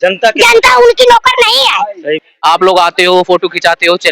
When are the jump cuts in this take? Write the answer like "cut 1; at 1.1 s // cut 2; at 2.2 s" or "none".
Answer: cut 1; at 2.3 s